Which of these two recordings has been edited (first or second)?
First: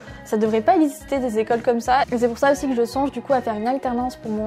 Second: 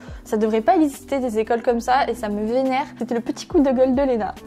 first